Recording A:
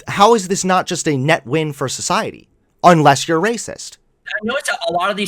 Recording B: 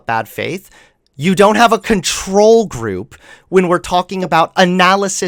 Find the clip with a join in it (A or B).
A